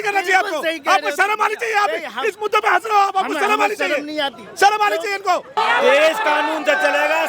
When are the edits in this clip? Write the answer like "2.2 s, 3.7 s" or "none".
5.6 s